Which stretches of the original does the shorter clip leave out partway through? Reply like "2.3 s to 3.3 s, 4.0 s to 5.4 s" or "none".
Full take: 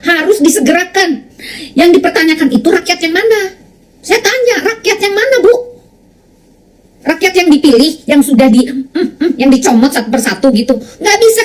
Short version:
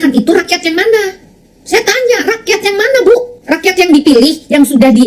5.7 s to 6.9 s